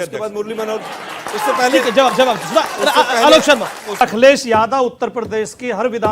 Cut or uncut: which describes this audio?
cut